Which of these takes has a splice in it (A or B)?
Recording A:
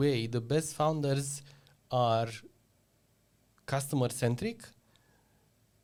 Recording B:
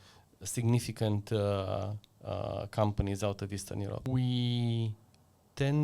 B